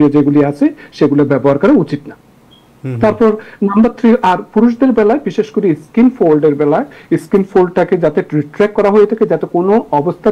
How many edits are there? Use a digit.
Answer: 0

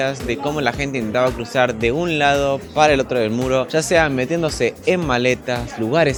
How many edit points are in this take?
0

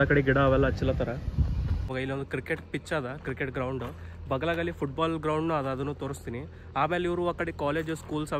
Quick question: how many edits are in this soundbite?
1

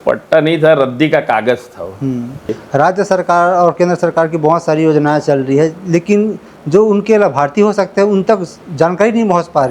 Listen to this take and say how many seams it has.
1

